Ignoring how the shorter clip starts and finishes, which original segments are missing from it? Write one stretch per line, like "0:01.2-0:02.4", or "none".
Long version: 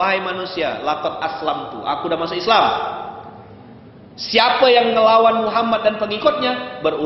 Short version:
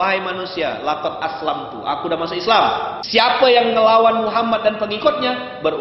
0:03.0-0:04.2